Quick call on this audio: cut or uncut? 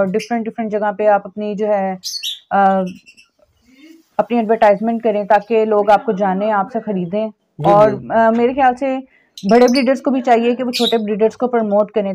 uncut